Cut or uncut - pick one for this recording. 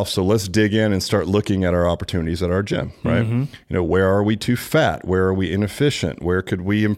uncut